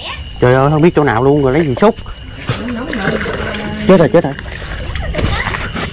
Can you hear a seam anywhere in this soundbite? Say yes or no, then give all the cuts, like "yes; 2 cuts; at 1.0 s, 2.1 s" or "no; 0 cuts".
no; 0 cuts